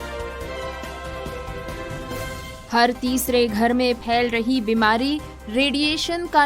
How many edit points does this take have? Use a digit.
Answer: 1